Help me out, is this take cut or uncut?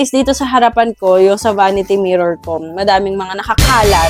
uncut